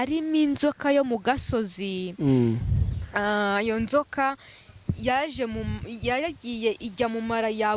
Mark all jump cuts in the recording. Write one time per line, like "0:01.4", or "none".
none